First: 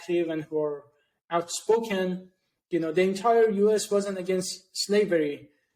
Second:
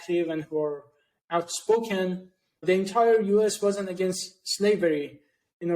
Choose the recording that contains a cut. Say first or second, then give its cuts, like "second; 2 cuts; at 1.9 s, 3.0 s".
second; 1 cut; at 2.6 s